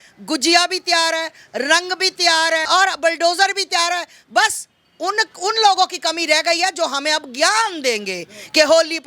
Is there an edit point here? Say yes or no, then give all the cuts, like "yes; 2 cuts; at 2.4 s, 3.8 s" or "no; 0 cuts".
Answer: yes; 1 cut; at 2.6 s